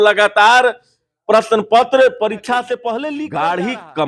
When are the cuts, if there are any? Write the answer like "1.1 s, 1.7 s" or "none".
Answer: 3.0 s